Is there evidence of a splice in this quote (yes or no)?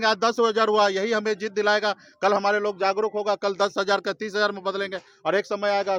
no